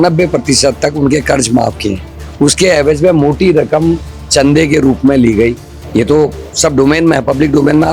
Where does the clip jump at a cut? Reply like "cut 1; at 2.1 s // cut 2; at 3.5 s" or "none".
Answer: none